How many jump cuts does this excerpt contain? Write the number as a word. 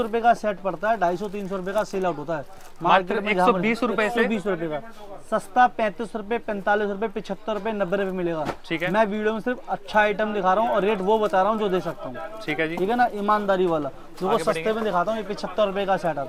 zero